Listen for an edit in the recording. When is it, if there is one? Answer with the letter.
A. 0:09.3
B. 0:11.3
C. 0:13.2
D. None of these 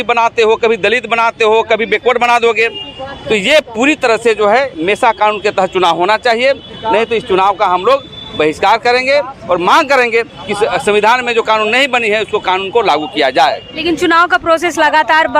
D